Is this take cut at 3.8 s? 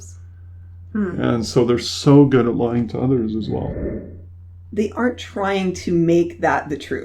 yes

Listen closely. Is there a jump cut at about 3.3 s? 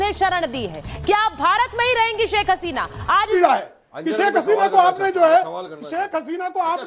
yes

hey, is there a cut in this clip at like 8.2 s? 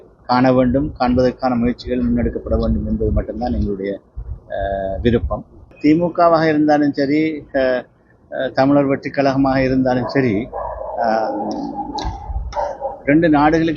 no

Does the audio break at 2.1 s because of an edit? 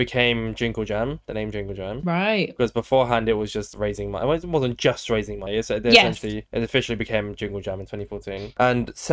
no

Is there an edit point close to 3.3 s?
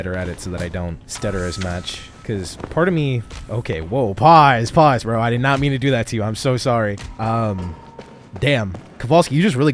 no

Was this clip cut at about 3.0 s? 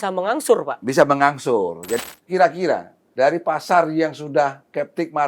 yes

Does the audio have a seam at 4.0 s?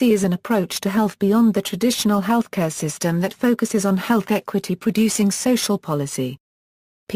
yes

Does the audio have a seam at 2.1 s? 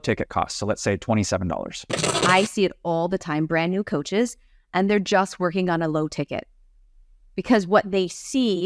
yes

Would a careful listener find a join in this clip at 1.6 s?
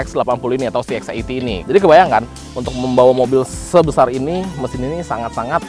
yes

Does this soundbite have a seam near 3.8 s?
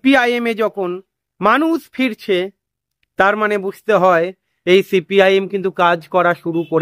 no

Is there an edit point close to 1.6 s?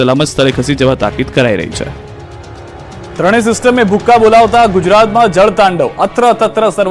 yes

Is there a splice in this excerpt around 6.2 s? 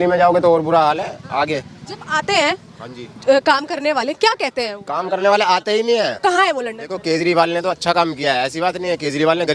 yes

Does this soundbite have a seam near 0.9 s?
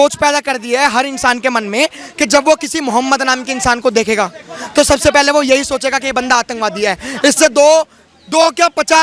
no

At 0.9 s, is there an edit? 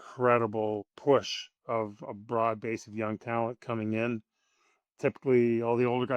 yes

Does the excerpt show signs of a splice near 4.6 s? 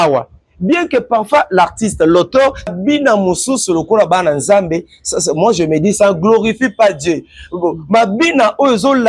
no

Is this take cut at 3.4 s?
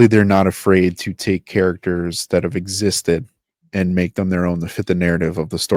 no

